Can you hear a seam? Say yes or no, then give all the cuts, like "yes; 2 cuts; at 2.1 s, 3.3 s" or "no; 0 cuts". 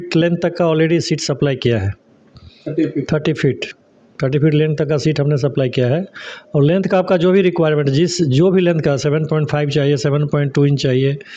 no; 0 cuts